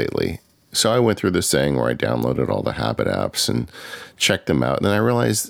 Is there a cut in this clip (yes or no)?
no